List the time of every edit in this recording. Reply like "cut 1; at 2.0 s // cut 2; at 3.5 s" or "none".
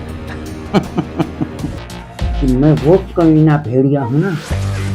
cut 1; at 1.9 s

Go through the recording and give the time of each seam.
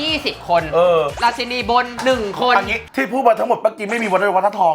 cut 1; at 1.1 s

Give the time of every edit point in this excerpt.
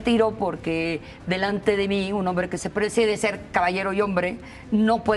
none

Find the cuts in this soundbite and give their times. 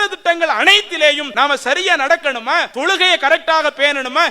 cut 1; at 1.3 s // cut 2; at 2.7 s

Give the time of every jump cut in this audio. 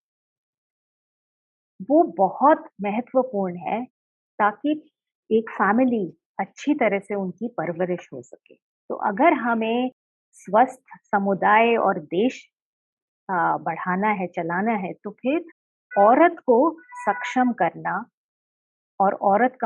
none

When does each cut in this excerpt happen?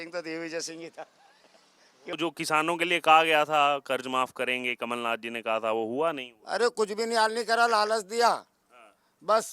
cut 1; at 2.1 s

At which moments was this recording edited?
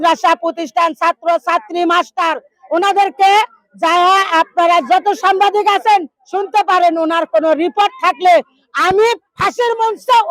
none

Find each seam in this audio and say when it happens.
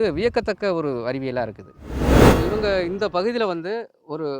cut 1; at 2.0 s // cut 2; at 2.5 s

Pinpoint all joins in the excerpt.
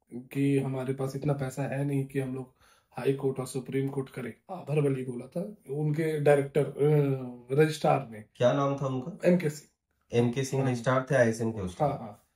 cut 1; at 4.6 s

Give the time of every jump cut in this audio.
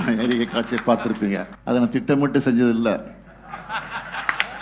cut 1; at 1.5 s

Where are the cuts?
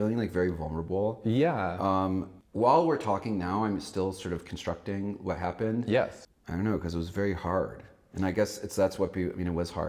cut 1; at 2.4 s // cut 2; at 6.2 s

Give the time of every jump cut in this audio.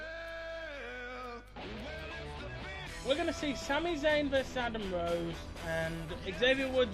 cut 1; at 5.6 s

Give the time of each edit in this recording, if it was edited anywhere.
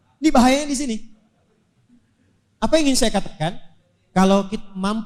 none

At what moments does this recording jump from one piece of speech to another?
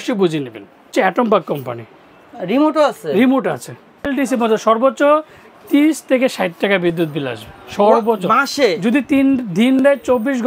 cut 1; at 0.9 s // cut 2; at 4.1 s

